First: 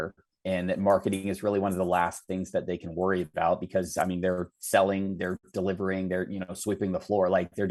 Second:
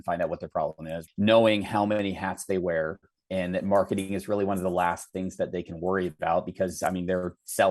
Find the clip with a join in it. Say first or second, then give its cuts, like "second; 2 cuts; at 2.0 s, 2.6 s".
second; 1 cut; at 0.9 s